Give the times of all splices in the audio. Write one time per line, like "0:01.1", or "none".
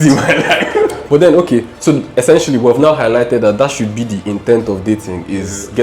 0:01.0